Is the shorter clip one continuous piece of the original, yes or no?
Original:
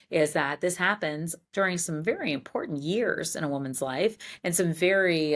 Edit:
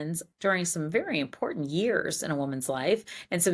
yes